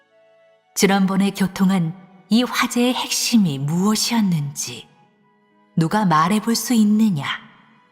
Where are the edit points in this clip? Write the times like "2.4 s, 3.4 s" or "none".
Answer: 6.9 s